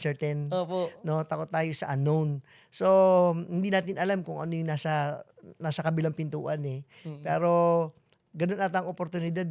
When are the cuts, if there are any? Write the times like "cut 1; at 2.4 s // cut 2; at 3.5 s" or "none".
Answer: none